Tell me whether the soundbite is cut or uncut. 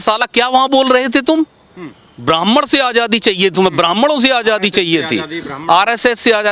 uncut